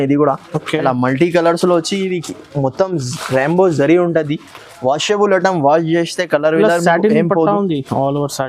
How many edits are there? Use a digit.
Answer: 0